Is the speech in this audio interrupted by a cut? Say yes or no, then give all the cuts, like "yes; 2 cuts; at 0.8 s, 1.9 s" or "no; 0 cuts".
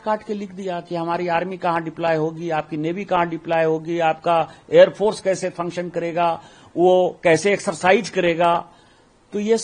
no; 0 cuts